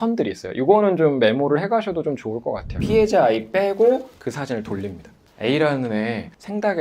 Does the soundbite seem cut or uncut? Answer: cut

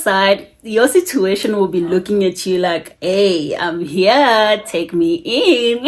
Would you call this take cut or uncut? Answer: uncut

